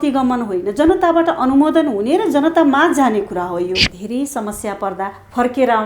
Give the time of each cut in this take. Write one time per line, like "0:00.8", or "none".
0:03.9